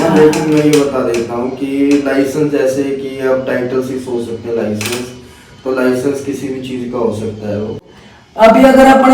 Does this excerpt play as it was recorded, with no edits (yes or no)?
no